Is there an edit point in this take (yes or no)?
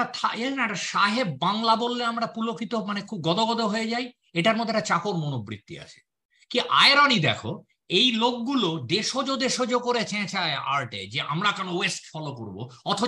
no